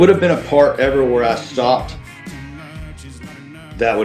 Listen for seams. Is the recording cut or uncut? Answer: uncut